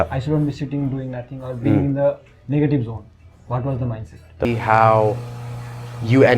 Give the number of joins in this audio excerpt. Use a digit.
1